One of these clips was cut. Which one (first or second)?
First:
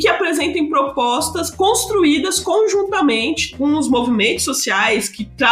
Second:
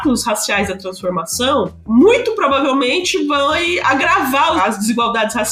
first